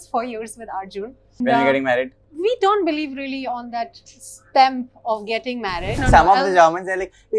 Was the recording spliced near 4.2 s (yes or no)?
no